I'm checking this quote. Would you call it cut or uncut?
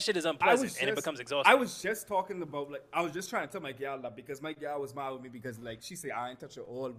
uncut